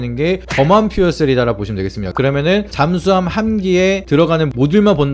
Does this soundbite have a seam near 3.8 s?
no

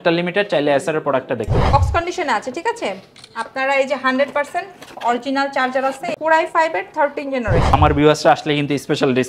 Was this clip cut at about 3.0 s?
no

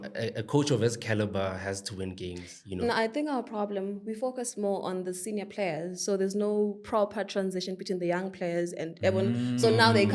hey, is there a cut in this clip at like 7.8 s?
no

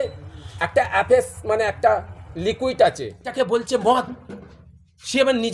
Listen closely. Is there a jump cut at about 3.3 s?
yes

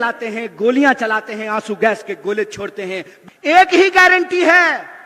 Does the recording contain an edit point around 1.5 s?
no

